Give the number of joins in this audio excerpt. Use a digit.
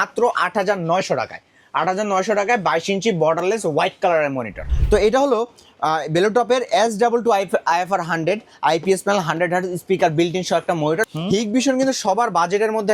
2